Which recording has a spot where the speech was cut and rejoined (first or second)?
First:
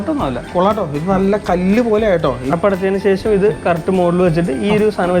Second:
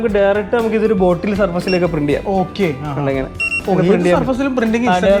first